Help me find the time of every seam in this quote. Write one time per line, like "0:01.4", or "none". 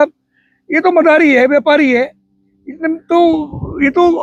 none